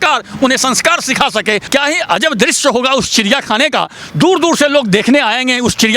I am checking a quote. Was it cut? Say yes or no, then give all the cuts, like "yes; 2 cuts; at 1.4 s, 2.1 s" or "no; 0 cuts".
yes; 1 cut; at 1.6 s